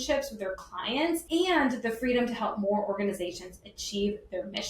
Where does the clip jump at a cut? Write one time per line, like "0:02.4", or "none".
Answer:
0:01.2